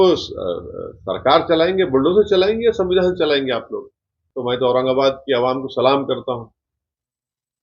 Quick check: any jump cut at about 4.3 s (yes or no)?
yes